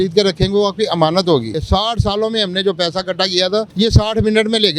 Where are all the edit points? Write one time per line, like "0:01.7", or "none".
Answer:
0:01.6
0:03.7